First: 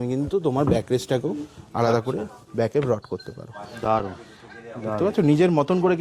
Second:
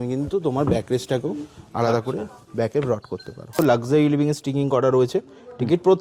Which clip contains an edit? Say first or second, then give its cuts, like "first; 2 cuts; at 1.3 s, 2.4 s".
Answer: second; 1 cut; at 3.6 s